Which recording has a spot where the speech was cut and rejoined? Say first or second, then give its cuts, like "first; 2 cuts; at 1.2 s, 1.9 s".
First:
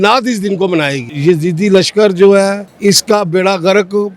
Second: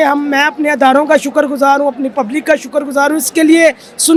first; 2 cuts; at 1.1 s, 2.7 s